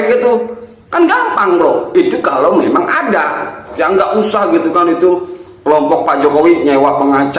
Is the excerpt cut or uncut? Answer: cut